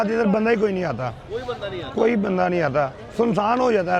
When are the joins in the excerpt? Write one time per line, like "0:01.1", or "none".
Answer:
none